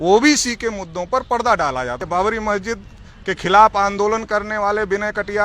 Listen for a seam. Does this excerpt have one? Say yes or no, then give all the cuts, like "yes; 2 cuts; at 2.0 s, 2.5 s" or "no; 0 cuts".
yes; 1 cut; at 2.0 s